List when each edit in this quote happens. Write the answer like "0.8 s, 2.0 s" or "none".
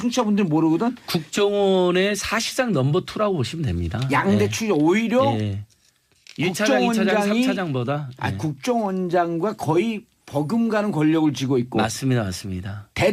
none

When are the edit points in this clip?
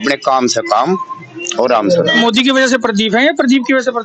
2.2 s

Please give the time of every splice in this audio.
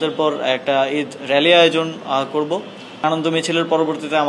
3.0 s

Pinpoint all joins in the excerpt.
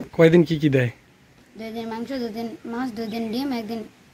none

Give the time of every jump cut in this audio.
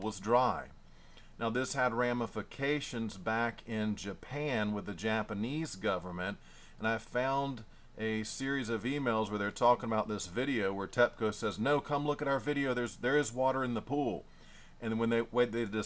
8.9 s

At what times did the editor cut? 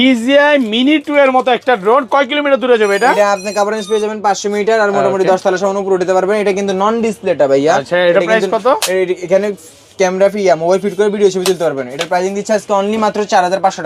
none

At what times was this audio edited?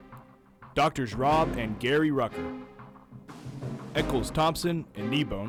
none

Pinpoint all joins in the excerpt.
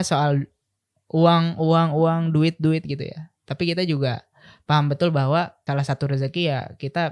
5.6 s

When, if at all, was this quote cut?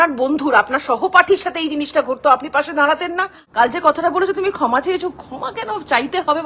3.3 s

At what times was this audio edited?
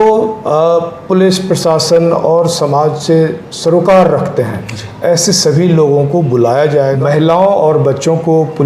7.0 s

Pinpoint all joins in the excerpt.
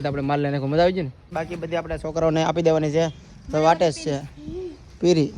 1.3 s

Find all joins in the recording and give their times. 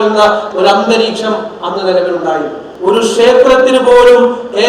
2.6 s

